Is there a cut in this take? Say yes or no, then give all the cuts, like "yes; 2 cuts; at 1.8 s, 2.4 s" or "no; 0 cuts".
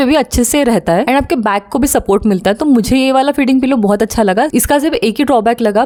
no; 0 cuts